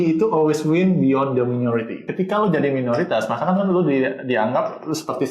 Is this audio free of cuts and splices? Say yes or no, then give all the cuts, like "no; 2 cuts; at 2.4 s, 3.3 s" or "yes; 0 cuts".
no; 1 cut; at 2.1 s